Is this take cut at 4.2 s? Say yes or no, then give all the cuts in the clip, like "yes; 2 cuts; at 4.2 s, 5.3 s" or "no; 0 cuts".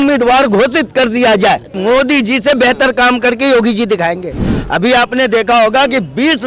no; 1 cut; at 1.7 s